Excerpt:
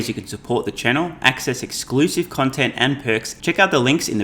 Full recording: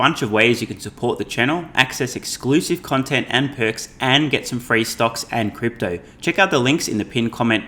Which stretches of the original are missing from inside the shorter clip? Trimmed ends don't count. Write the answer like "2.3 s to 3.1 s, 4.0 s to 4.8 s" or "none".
3.8 s to 6.1 s